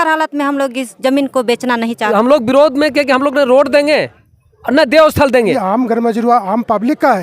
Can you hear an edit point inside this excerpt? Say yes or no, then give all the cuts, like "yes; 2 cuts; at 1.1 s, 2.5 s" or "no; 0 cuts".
yes; 2 cuts; at 2.1 s, 5.6 s